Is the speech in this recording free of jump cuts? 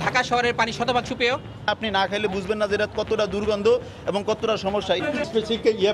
no; 2 cuts; at 1.6 s, 5.0 s

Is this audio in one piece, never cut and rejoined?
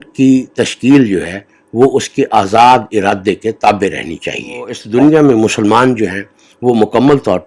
no; 1 cut; at 4.8 s

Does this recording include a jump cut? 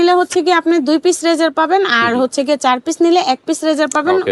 no; 0 cuts

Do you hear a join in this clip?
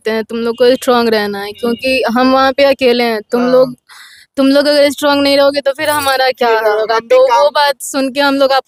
no; 0 cuts

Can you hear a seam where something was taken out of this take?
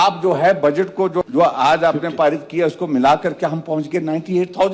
yes; 1 cut; at 1.3 s

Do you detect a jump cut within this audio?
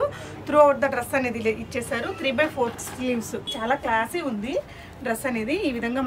yes; 1 cut; at 3.5 s

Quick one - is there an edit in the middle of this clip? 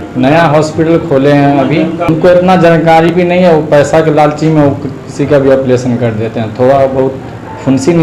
no; 0 cuts

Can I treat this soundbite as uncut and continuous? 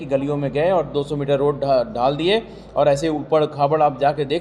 yes; 0 cuts

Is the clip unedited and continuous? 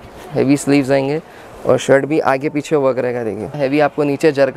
no; 1 cut; at 3.6 s

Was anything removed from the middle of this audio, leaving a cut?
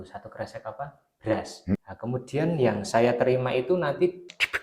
yes; 1 cut; at 1.8 s

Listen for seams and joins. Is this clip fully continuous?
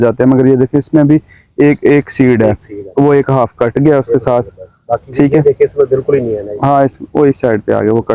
yes; 0 cuts

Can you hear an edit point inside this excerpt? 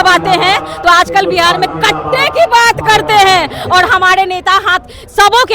no; 0 cuts

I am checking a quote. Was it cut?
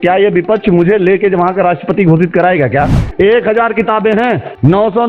yes; 1 cut; at 3.0 s

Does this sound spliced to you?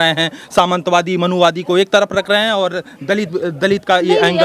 no; 0 cuts

